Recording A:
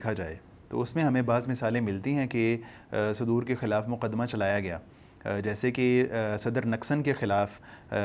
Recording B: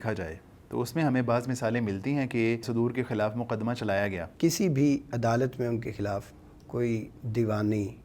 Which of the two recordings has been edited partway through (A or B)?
B